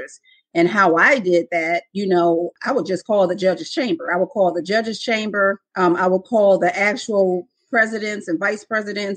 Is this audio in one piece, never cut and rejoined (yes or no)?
no